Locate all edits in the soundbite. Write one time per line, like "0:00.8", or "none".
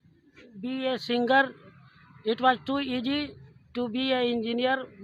none

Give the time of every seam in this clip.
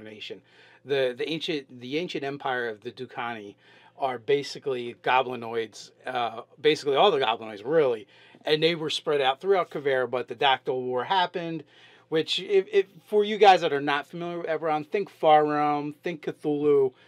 0:05.6

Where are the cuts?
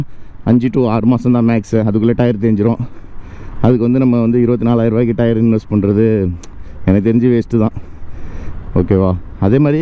none

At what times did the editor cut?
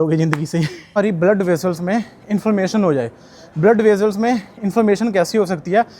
0:01.0

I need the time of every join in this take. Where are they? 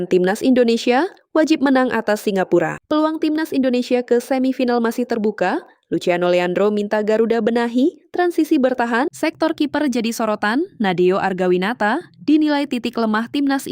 0:02.8
0:09.1

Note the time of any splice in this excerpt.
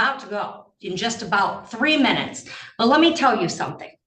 none

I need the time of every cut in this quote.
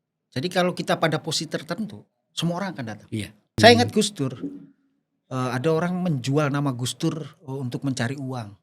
0:03.6

